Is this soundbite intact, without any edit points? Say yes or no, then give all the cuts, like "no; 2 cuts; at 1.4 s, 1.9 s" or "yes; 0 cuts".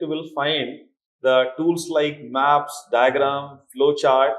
yes; 0 cuts